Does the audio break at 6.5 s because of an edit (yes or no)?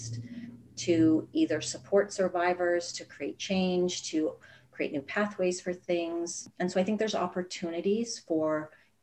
yes